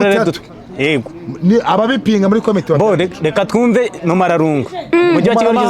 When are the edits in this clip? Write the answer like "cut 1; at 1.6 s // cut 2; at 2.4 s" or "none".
none